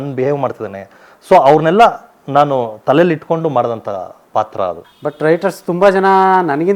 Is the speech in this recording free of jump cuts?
no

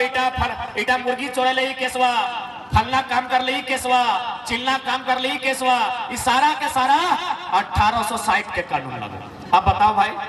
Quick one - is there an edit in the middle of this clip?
no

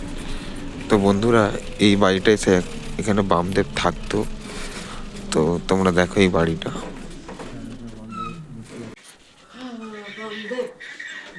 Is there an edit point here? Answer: yes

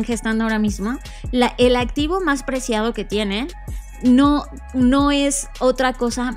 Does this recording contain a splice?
no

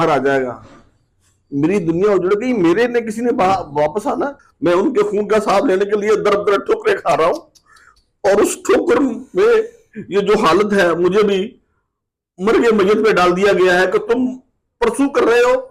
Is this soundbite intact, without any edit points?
no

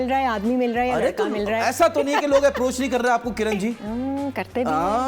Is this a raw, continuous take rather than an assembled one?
no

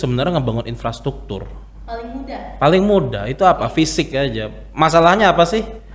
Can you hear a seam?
no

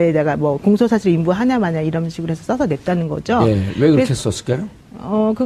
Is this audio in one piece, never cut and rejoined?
no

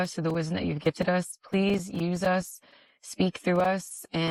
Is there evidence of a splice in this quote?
no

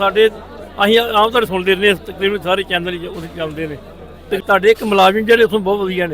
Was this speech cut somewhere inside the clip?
yes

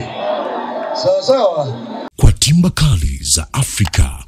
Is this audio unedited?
no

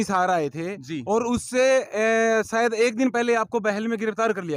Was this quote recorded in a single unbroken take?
yes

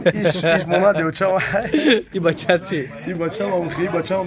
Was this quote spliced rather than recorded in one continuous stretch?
yes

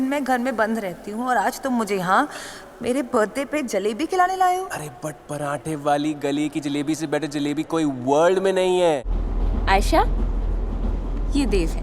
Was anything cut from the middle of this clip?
yes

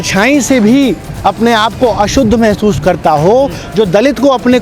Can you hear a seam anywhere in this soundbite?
yes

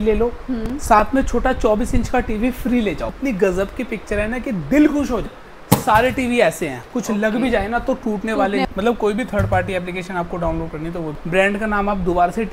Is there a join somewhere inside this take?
yes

